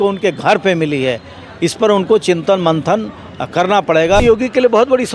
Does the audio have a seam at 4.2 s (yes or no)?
yes